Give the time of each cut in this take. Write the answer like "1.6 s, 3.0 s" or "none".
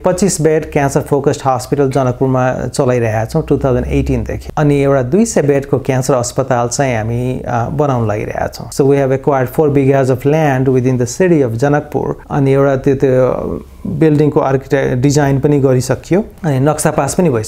none